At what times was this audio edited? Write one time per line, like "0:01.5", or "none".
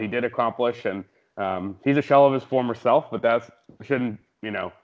none